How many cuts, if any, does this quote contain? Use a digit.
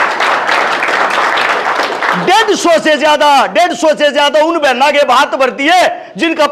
0